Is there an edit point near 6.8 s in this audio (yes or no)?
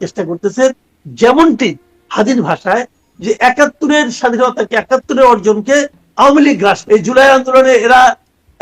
yes